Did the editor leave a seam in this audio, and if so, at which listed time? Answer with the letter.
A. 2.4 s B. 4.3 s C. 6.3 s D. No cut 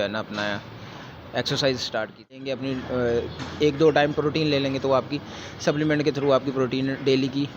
A